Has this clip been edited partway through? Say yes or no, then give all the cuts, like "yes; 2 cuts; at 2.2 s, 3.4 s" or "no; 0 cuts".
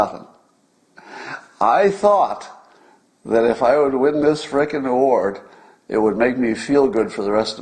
no; 0 cuts